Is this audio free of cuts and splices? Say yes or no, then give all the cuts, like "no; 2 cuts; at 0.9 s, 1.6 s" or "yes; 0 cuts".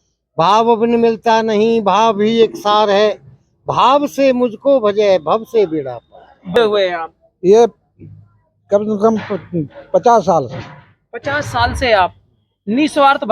no; 1 cut; at 6.6 s